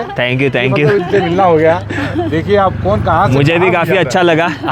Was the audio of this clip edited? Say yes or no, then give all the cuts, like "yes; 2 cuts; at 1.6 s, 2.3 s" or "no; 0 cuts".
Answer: no; 0 cuts